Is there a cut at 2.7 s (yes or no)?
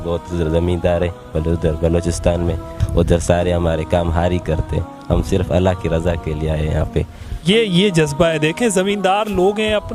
yes